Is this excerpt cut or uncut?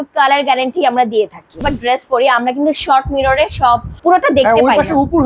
cut